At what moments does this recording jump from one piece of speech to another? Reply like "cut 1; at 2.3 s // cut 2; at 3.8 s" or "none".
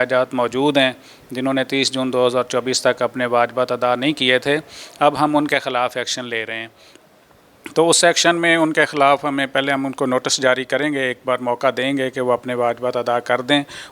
none

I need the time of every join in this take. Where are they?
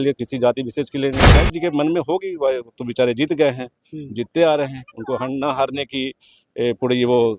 cut 1; at 1.4 s

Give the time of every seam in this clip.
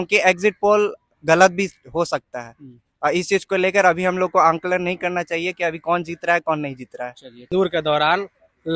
cut 1; at 7.5 s

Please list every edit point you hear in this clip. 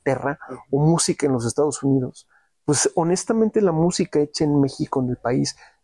none

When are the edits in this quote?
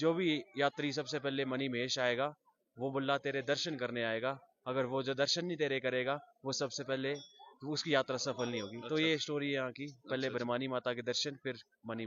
none

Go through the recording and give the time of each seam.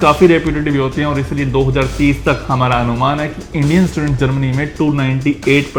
none

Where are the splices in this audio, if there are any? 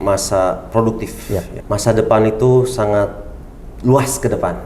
cut 1; at 1.5 s

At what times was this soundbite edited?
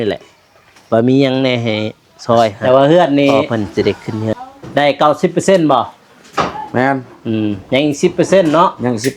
cut 1; at 2.6 s

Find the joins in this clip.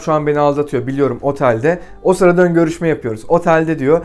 none

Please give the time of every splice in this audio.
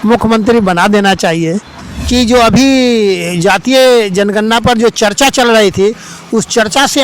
cut 1; at 1.7 s

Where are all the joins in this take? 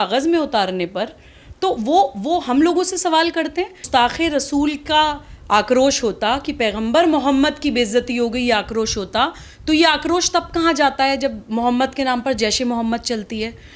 cut 1; at 3.8 s

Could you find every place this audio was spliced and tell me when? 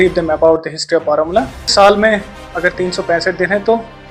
cut 1; at 1.7 s

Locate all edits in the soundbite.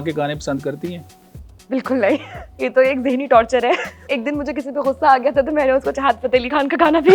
cut 1; at 2.4 s // cut 2; at 4.1 s

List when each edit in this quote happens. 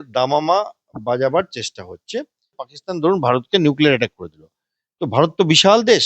cut 1; at 2.7 s

